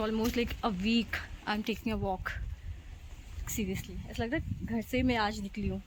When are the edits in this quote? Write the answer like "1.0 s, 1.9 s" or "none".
none